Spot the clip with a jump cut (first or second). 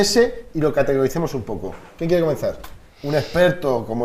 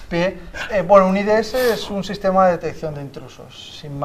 second